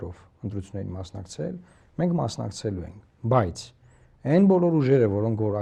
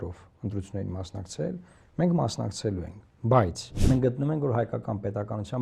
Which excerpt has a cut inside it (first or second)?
second